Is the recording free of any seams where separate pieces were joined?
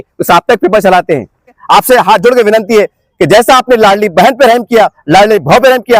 no; 1 cut; at 1.5 s

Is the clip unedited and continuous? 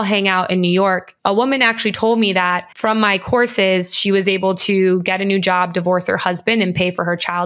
no; 2 cuts; at 1.1 s, 2.7 s

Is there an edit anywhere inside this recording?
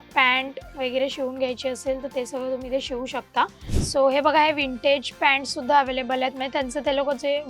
yes; 1 cut; at 3.7 s

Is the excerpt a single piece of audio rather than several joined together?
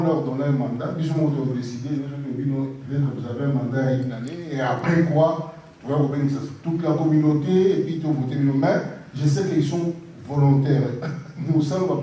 yes; 0 cuts

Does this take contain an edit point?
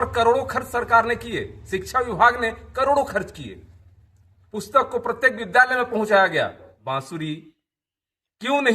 yes; 1 cut; at 6.7 s

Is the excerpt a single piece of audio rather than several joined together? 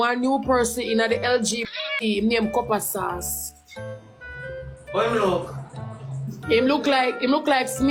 yes; 0 cuts

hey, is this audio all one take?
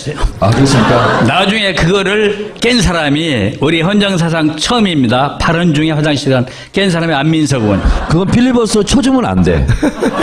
yes; 0 cuts

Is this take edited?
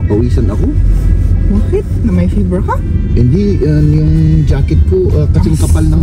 no; 0 cuts

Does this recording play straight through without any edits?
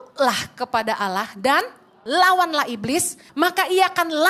no; 1 cut; at 3.2 s

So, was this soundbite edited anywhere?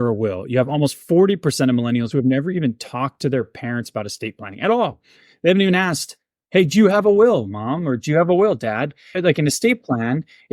yes; 1 cut; at 9.2 s

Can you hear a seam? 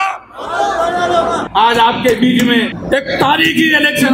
yes; 2 cuts; at 1.4 s, 2.8 s

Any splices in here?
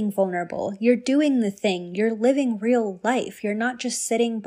no; 0 cuts

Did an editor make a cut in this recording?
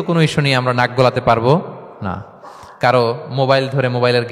no; 0 cuts

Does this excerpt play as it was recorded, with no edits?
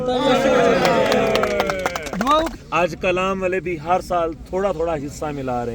no; 1 cut; at 2.6 s

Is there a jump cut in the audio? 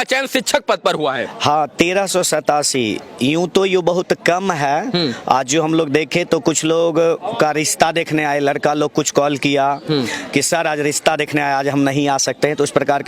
no; 0 cuts

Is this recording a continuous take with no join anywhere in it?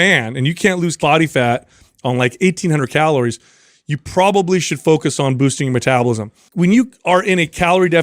no; 2 cuts; at 1.0 s, 6.4 s

